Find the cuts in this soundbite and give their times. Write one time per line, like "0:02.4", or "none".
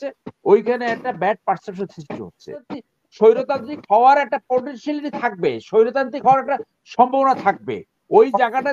0:02.7

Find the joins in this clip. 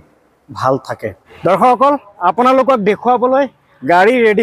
0:01.2

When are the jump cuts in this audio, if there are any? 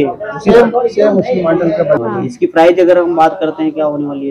0:02.0

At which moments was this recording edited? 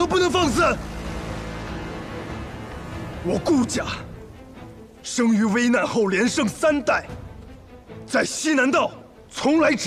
none

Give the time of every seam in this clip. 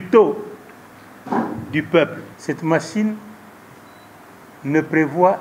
0:02.3

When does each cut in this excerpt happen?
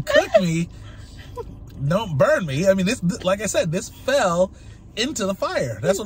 none

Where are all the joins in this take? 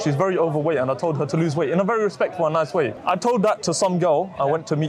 0:03.0

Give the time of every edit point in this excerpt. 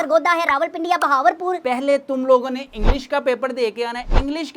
0:01.6

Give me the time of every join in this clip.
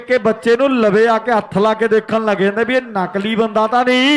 none

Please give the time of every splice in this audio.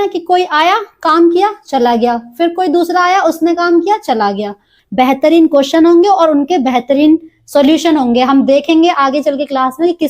0:04.8

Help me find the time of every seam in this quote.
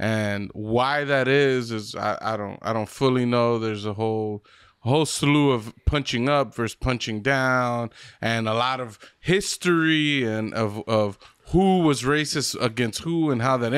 none

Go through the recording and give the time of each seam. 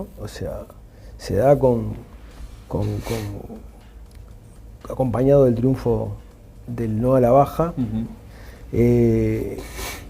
none

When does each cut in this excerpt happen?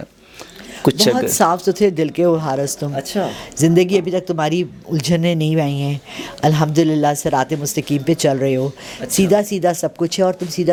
none

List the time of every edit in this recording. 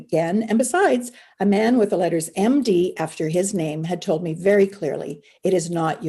none

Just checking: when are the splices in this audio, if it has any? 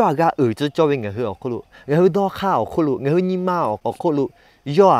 0:03.9

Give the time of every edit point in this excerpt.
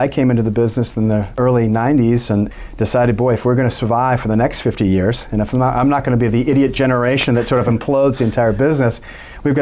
none

